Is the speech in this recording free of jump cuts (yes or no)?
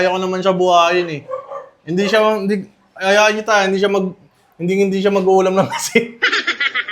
yes